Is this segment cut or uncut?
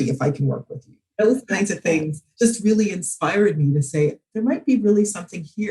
cut